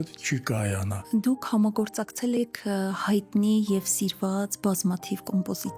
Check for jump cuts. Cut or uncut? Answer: cut